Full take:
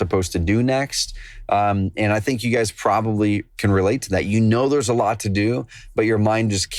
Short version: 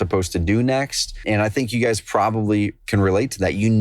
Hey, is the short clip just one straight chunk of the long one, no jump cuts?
no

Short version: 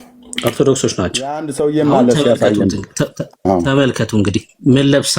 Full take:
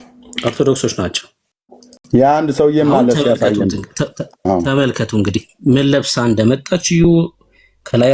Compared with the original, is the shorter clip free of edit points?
no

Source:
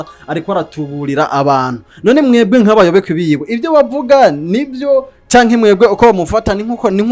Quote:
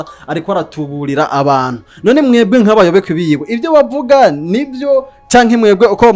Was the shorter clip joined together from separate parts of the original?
no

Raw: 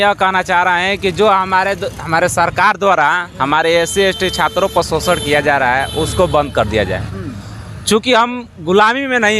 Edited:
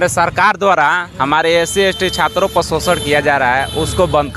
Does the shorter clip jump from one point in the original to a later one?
no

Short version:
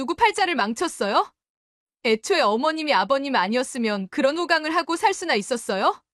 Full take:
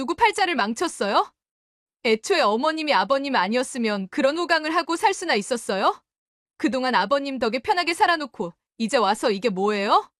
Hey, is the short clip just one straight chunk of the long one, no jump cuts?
yes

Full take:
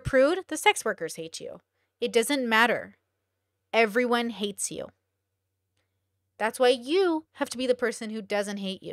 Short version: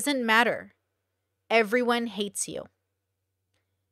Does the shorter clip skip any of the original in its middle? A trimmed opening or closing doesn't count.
no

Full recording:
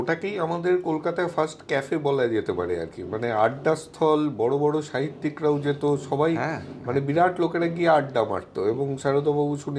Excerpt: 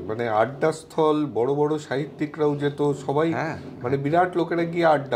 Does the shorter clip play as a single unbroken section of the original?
yes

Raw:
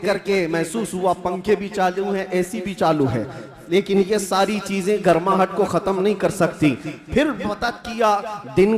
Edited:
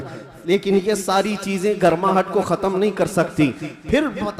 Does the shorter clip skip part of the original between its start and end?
no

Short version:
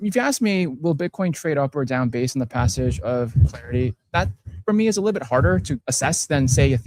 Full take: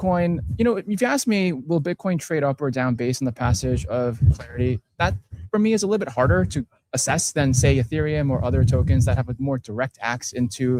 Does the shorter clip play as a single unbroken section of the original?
no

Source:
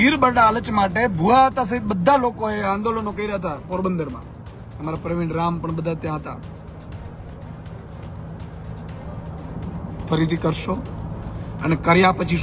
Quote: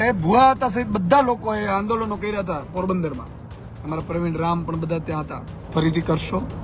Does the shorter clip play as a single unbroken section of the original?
no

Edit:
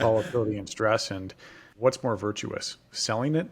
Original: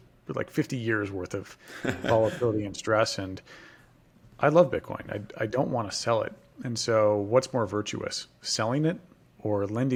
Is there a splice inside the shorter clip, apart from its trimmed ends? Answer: yes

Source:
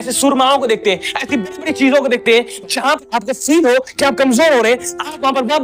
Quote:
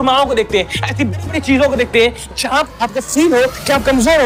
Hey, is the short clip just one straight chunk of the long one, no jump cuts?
yes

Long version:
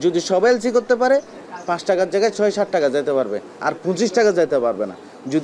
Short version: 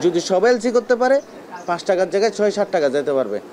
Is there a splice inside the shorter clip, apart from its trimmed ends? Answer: no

